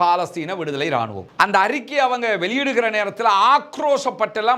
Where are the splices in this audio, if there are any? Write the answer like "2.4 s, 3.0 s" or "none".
1.2 s